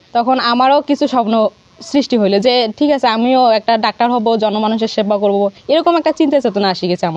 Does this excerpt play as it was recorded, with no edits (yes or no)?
yes